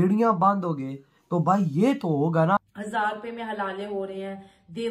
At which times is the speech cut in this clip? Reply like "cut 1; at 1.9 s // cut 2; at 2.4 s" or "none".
cut 1; at 2.6 s